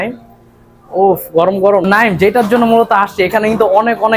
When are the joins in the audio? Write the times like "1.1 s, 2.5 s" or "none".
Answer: 1.8 s